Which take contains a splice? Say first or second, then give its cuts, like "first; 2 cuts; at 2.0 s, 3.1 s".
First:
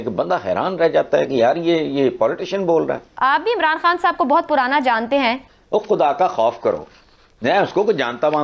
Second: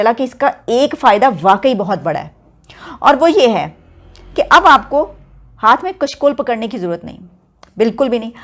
first; 2 cuts; at 3.0 s, 5.5 s